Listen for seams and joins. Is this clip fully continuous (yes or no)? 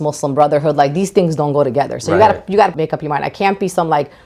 yes